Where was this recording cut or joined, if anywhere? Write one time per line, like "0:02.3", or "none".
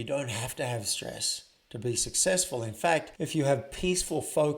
0:03.1